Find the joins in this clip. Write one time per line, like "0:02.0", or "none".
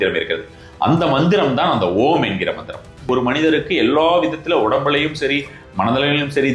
0:03.0

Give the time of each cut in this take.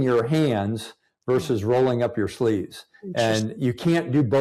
none

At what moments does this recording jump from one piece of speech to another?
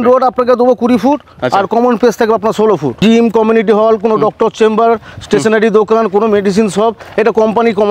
0:03.0

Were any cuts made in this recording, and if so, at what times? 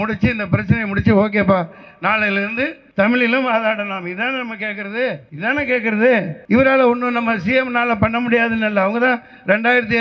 0:02.8
0:05.3
0:06.3

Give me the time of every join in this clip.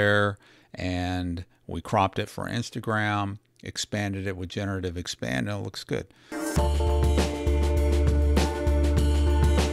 0:06.2

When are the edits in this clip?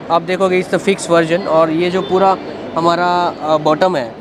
none

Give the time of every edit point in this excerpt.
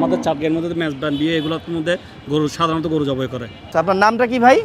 0:03.7

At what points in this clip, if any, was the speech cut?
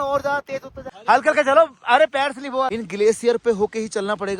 0:00.9
0:02.7

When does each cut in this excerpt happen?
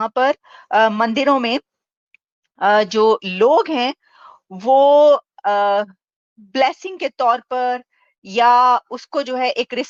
none

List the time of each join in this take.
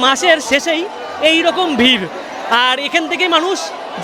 none

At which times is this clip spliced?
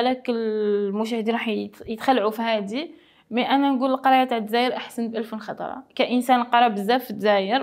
none

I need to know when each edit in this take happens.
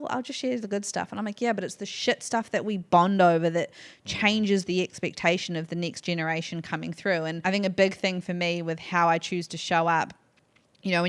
none

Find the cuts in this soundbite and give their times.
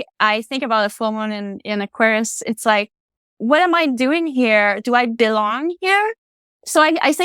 none

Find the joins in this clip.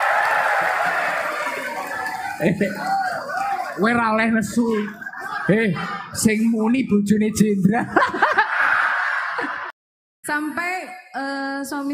0:09.6

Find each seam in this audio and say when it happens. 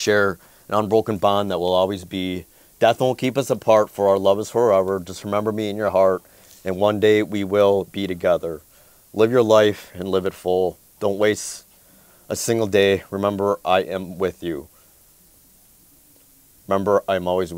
none

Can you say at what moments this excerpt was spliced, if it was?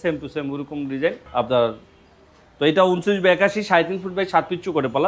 0:01.2

